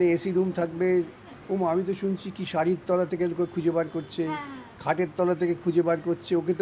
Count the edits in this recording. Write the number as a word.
one